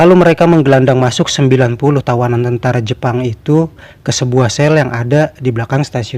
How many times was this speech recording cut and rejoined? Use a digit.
0